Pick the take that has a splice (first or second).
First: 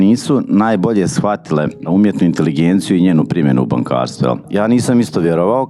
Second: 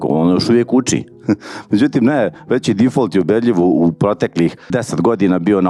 first